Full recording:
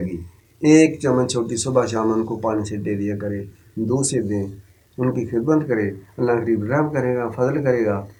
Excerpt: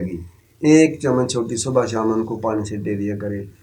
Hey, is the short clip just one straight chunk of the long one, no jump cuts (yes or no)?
yes